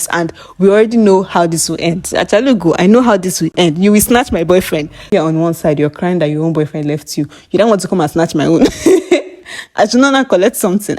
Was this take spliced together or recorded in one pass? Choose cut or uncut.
cut